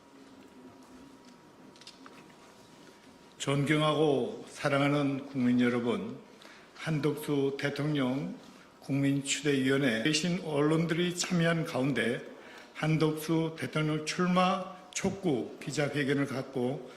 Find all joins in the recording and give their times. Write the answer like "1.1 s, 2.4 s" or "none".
10.1 s